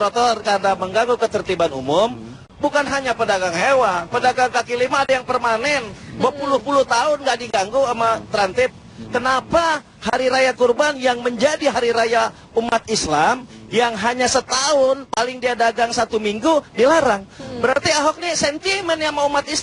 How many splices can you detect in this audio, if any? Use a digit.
0